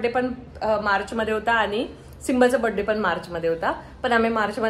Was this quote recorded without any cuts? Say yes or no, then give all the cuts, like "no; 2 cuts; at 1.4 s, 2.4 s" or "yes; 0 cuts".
yes; 0 cuts